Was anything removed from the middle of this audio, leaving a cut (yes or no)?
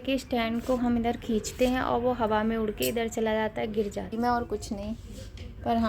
yes